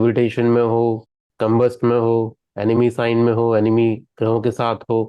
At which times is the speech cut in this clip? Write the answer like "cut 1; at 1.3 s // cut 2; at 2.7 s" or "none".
cut 1; at 1.3 s